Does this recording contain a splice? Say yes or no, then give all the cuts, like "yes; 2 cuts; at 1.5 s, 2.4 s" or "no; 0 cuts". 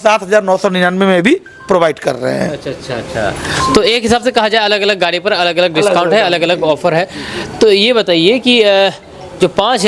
no; 0 cuts